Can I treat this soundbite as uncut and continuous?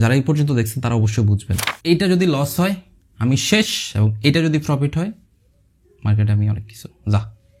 no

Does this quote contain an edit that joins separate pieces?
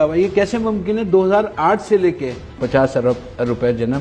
yes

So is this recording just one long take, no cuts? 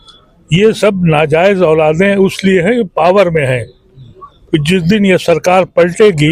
yes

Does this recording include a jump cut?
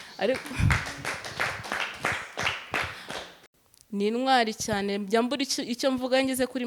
yes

